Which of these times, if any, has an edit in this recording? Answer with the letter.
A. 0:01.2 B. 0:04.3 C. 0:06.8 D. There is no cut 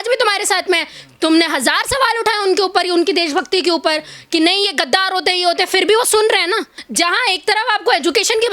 C